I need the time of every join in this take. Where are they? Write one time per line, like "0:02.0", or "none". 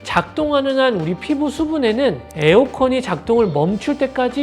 0:02.3